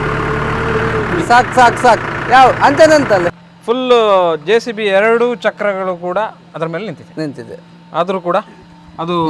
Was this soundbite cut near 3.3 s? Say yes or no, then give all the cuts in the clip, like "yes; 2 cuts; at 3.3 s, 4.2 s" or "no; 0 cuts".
yes; 1 cut; at 3.3 s